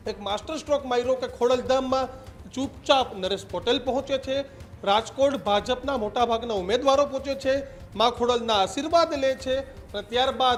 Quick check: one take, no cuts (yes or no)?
yes